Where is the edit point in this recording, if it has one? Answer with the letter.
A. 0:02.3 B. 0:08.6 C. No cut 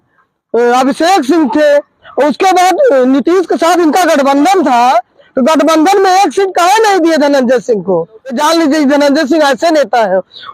B